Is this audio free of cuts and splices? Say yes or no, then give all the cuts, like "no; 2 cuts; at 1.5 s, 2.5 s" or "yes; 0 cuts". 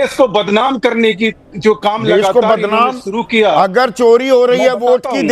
yes; 0 cuts